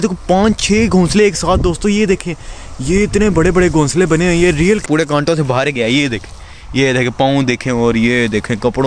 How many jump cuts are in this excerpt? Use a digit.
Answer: 1